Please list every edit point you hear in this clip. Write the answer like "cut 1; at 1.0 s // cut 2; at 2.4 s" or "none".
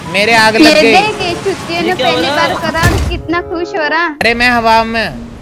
cut 1; at 4.2 s